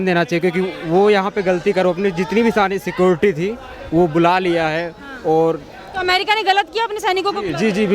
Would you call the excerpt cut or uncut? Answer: uncut